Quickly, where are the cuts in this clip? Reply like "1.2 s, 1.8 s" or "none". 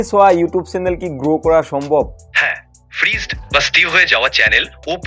2.2 s